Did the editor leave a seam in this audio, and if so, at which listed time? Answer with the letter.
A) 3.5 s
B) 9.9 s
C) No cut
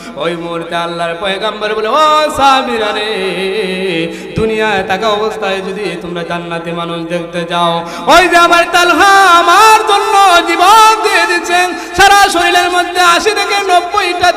C